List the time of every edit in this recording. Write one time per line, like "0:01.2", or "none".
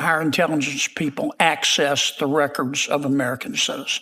none